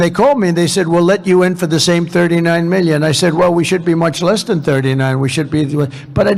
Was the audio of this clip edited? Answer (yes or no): no